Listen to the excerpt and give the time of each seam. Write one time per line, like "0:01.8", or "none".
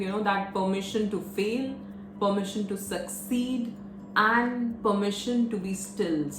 none